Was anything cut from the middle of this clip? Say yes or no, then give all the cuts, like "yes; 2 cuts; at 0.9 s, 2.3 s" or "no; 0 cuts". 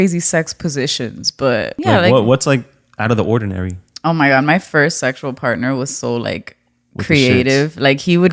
yes; 1 cut; at 1.8 s